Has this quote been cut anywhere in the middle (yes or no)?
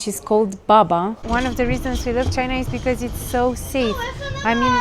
yes